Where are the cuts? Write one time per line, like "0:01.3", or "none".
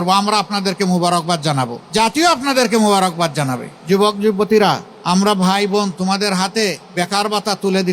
0:01.8
0:03.7
0:04.9
0:06.8